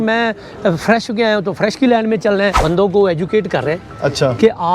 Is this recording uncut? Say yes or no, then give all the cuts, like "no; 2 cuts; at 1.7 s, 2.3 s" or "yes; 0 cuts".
no; 1 cut; at 2.6 s